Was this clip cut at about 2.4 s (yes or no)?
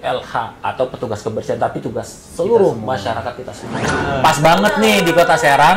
no